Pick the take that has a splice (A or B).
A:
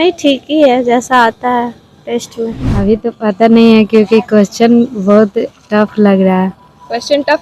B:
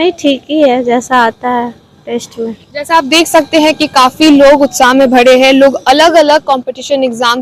A